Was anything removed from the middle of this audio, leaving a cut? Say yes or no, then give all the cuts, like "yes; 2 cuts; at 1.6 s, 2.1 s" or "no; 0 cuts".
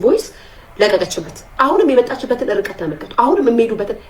yes; 1 cut; at 1.5 s